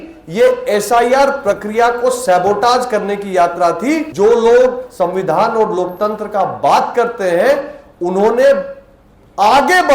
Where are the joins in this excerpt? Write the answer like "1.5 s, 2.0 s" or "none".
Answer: 4.1 s